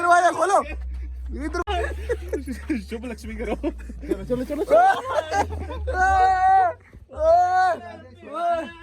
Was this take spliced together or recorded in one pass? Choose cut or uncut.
cut